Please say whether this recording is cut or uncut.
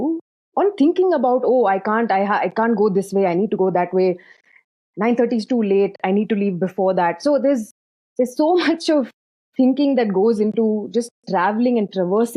uncut